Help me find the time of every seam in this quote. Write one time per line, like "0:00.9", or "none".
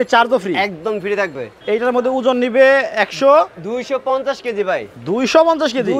0:01.6